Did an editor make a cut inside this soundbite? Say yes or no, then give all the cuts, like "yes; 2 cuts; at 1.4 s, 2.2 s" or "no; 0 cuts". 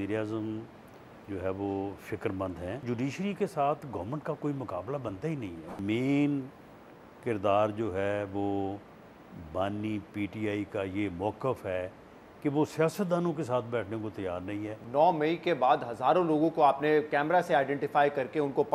yes; 3 cuts; at 2.8 s, 5.8 s, 14.7 s